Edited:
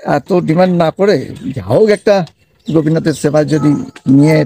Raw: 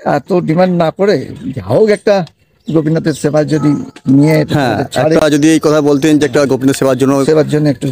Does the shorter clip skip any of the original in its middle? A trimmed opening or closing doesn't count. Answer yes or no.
no